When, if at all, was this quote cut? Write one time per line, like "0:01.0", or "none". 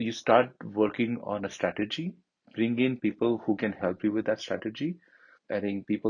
0:05.2